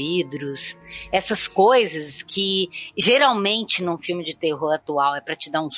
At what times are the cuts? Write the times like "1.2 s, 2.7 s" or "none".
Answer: none